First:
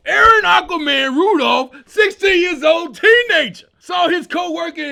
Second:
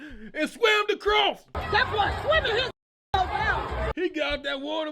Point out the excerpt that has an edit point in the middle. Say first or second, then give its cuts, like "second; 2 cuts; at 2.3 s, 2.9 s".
second; 1 cut; at 3.9 s